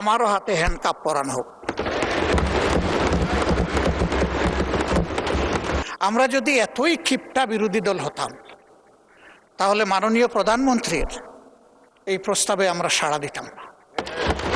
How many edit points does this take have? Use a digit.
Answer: 1